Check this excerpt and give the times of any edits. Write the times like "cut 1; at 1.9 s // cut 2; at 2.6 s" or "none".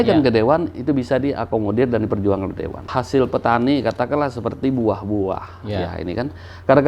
cut 1; at 2.9 s